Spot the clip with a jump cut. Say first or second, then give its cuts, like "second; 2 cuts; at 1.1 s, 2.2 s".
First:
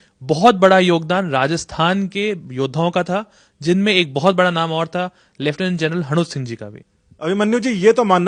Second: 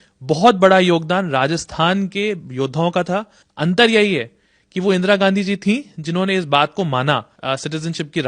second; 2 cuts; at 3.4 s, 7.3 s